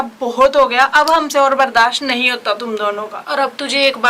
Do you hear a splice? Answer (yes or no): no